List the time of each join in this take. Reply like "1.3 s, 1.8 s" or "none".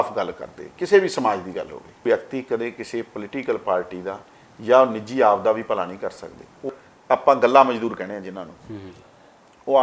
2.0 s, 6.7 s

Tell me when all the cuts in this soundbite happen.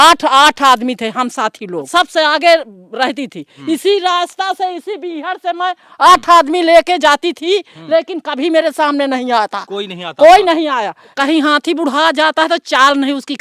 1.9 s, 3.5 s, 11.0 s

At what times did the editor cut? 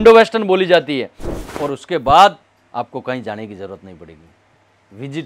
1.4 s

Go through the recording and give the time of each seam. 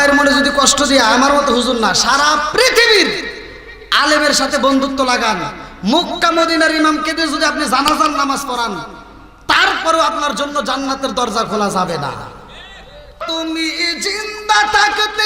13.2 s

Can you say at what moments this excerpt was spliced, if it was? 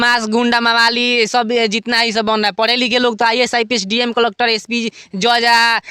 none

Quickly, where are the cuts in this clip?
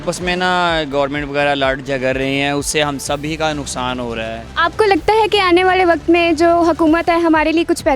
none

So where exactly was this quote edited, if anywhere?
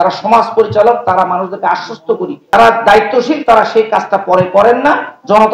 2.5 s

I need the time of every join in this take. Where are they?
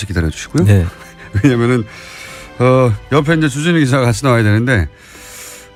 none

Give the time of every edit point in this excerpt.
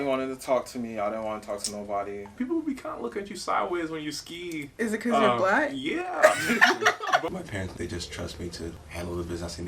2.3 s, 7.3 s, 8.8 s

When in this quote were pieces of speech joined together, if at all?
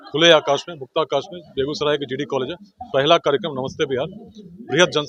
none

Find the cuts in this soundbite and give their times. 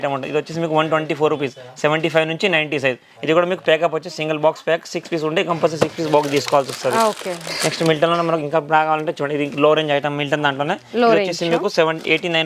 none

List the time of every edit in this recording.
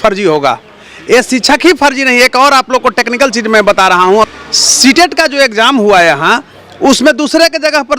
4.3 s

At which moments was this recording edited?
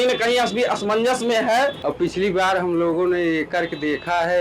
1.8 s

